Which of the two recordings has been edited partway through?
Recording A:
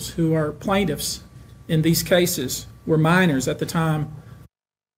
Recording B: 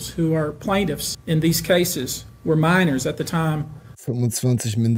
B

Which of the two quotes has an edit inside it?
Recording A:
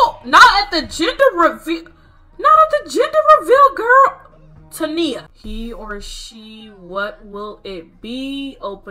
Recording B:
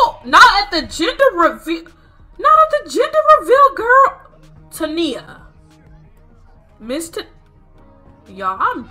A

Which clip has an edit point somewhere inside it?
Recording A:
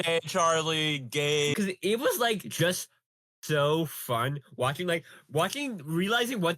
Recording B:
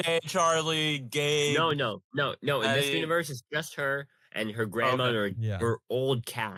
A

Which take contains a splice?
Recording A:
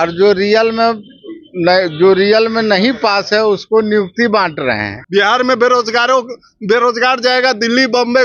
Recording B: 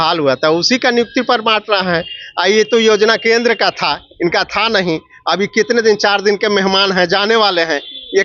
A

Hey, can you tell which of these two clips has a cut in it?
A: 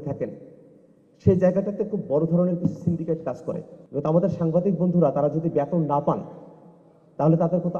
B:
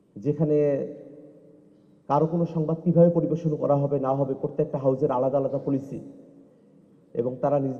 A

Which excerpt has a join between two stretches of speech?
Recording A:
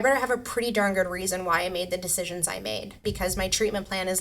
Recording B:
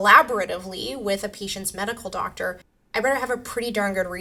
A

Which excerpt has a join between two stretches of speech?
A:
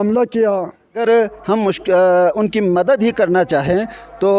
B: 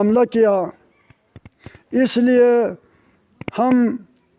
A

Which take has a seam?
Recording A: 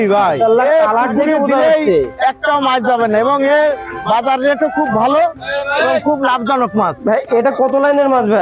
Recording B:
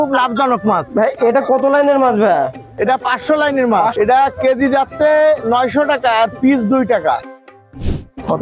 B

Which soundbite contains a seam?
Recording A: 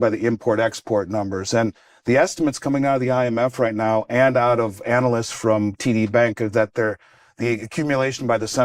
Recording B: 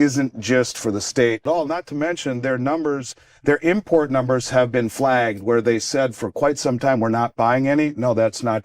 B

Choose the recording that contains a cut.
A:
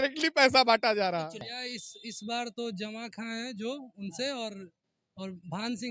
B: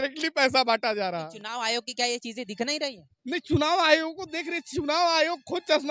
A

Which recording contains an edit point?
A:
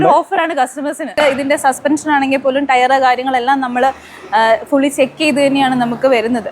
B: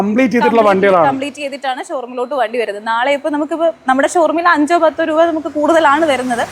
A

